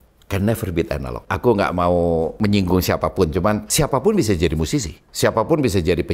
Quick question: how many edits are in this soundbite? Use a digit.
4